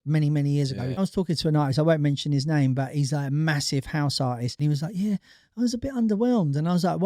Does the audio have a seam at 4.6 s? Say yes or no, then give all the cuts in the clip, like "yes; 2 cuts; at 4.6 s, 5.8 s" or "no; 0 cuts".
yes; 2 cuts; at 1.0 s, 4.6 s